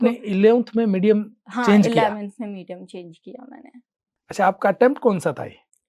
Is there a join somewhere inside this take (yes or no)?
yes